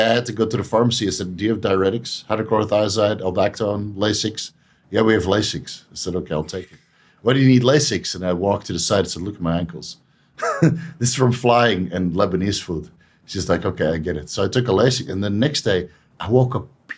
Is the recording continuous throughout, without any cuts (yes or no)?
yes